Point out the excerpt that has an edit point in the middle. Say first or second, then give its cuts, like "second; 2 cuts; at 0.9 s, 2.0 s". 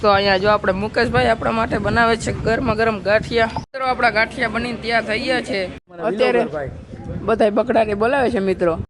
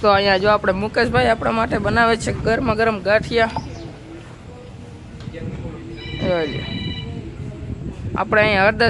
first; 2 cuts; at 3.7 s, 5.8 s